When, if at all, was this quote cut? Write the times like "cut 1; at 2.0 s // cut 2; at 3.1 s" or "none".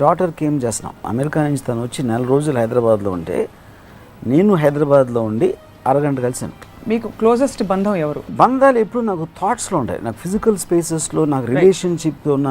cut 1; at 1.1 s // cut 2; at 6.7 s // cut 3; at 8.3 s